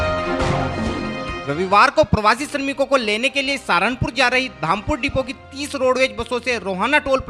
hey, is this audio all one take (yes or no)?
no